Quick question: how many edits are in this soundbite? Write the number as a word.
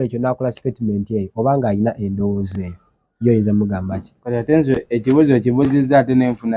zero